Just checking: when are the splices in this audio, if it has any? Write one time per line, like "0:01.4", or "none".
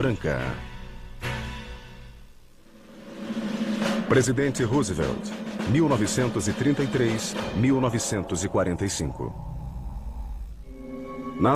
0:04.9